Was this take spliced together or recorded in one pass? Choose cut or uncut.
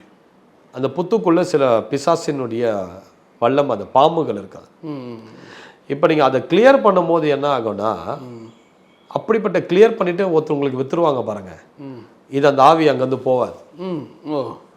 uncut